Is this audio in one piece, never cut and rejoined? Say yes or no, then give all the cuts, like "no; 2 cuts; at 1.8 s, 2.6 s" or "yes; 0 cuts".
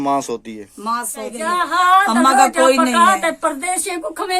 no; 1 cut; at 1.4 s